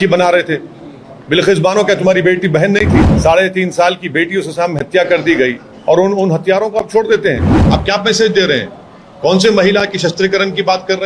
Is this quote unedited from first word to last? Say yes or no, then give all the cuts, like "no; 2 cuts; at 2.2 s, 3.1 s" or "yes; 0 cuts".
no; 2 cuts; at 3.0 s, 7.5 s